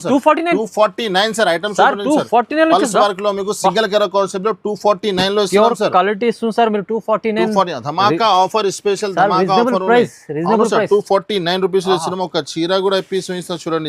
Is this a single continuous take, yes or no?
yes